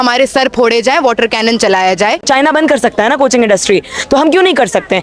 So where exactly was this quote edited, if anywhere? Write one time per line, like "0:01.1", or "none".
0:02.2

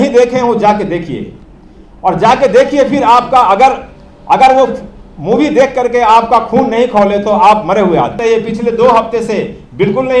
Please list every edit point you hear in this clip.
0:08.2

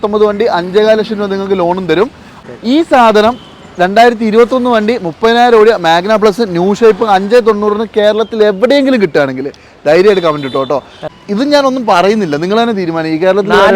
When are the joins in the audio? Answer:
0:02.3
0:11.0

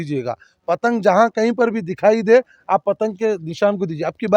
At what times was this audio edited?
none

